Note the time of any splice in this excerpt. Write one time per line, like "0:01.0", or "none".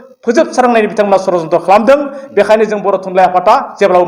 none

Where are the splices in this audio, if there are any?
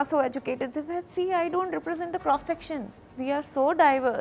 0:03.0

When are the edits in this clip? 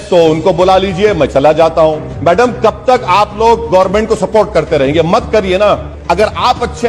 0:02.1
0:05.9

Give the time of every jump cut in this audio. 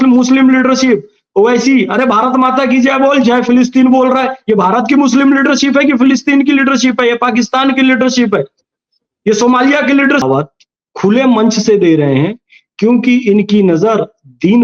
0:10.2

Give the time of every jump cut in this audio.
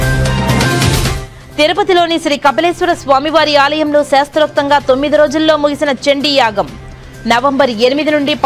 0:01.3

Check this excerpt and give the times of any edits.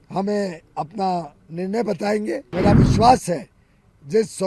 0:02.5

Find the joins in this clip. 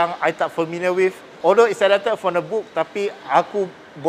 0:01.3

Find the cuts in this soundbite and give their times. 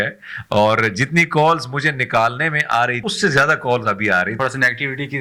0:03.0
0:04.3

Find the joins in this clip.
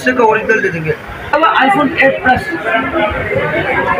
0:01.3

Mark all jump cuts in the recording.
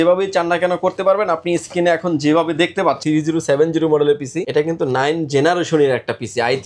0:03.0
0:04.4

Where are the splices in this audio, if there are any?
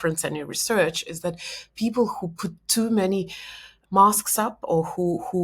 0:03.7

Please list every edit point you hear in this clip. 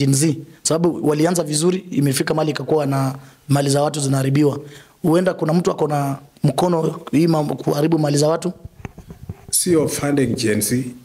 none

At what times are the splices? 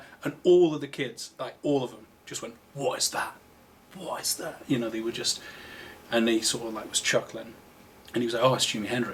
none

